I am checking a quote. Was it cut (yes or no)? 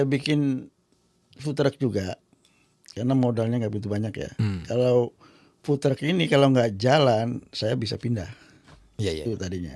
no